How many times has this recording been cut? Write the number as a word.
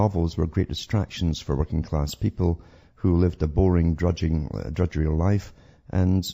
one